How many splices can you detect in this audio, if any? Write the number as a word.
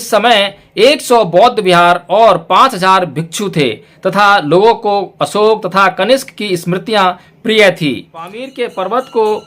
one